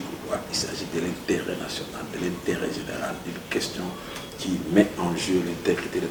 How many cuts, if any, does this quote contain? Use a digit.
0